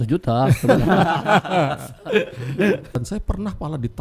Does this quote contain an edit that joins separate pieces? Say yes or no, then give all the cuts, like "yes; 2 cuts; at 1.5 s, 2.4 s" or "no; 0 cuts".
yes; 1 cut; at 3.0 s